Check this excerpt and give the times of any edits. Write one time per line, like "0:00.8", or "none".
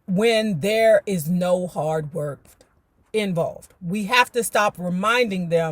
0:02.4